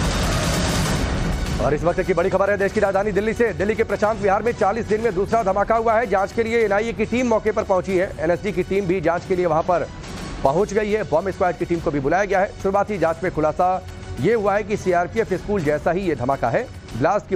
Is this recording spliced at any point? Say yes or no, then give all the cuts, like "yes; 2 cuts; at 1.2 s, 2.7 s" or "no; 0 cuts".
no; 0 cuts